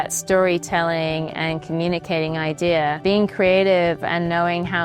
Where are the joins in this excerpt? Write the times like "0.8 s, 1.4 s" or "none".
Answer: 3.0 s